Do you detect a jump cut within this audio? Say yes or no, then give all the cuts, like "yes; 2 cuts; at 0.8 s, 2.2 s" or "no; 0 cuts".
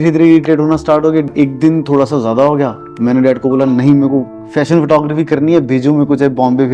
yes; 1 cut; at 1.3 s